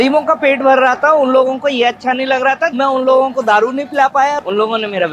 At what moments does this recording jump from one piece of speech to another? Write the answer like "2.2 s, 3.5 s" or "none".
2.7 s, 4.4 s

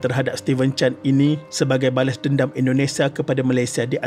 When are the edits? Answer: none

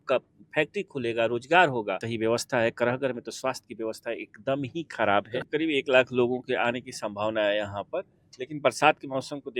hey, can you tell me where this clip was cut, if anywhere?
2.0 s, 5.5 s

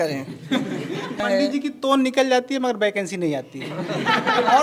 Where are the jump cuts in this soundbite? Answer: 1.2 s

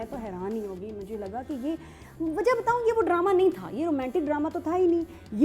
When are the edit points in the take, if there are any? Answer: none

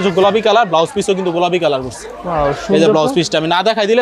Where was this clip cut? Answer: none

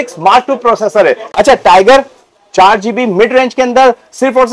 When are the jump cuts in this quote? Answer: 1.2 s

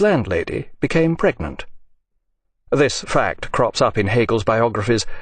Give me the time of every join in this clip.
4.3 s

